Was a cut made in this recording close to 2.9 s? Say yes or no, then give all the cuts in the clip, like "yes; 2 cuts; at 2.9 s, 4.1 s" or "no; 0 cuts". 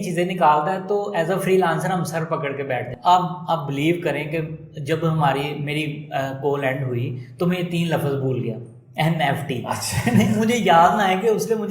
yes; 1 cut; at 2.9 s